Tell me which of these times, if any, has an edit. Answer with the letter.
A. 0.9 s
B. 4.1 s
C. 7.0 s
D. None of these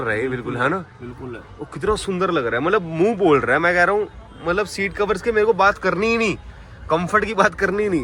D